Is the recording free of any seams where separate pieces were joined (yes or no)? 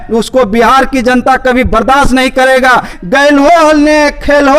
no